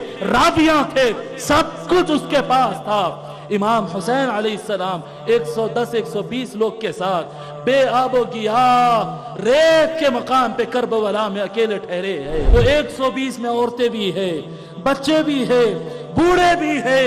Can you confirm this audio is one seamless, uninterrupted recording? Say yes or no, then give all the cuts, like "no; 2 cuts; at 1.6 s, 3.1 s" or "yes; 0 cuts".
no; 1 cut; at 12.5 s